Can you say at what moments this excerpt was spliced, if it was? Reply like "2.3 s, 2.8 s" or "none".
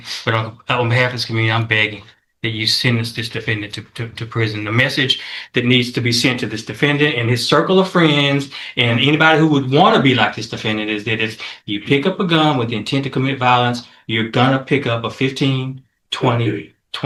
none

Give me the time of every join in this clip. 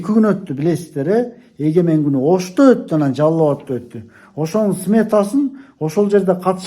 none

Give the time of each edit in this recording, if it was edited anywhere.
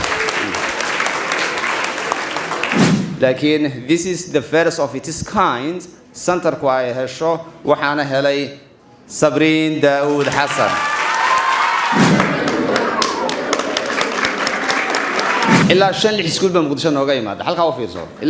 12.1 s, 15.6 s

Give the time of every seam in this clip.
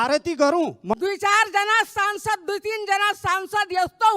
0.9 s

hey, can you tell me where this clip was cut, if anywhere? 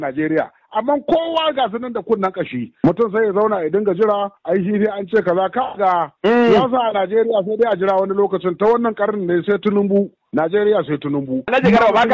none

